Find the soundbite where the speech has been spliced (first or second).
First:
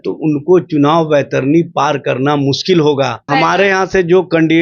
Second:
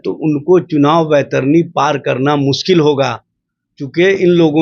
first